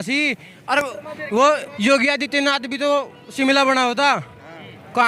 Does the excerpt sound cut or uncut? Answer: uncut